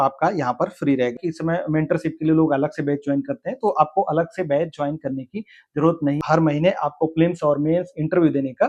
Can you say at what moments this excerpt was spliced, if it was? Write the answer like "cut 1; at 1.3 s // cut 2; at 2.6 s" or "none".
cut 1; at 1.2 s // cut 2; at 6.2 s